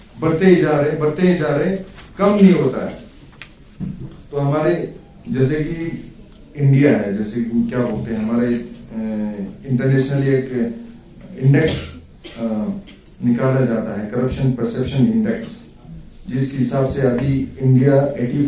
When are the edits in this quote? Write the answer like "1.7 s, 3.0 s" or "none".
none

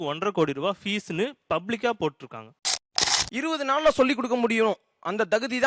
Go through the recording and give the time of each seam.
2.9 s

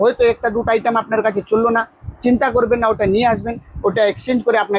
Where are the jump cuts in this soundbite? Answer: none

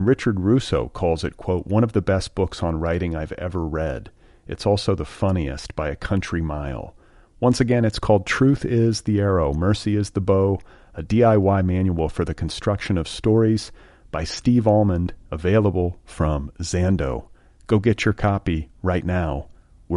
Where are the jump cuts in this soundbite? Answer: none

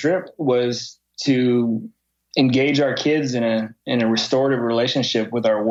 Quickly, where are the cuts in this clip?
none

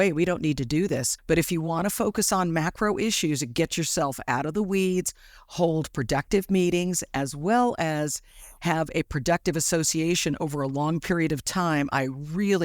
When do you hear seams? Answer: 1.1 s

